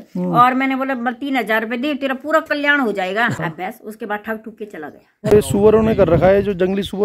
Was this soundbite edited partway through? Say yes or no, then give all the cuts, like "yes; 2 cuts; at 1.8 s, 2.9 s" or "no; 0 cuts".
yes; 2 cuts; at 3.4 s, 5.3 s